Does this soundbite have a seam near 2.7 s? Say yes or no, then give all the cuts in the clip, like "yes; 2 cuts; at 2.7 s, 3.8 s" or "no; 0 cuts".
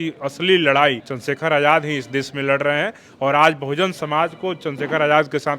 no; 1 cut; at 1.1 s